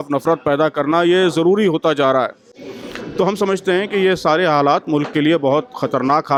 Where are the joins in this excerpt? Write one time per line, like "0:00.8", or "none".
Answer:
none